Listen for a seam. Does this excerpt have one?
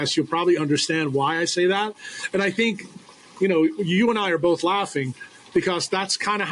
no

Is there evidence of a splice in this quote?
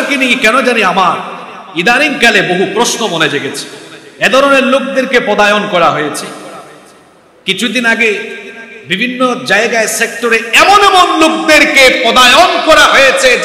no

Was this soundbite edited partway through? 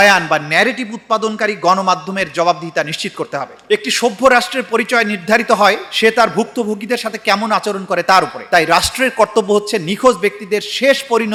no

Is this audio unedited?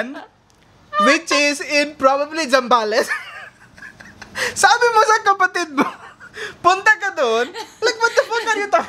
yes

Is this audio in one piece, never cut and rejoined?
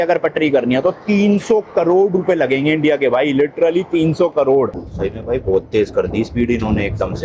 no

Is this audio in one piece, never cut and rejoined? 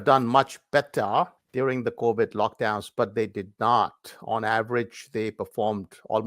no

